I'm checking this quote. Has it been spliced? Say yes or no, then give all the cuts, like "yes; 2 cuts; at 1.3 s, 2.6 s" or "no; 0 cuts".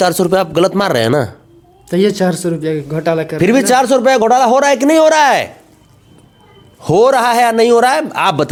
no; 0 cuts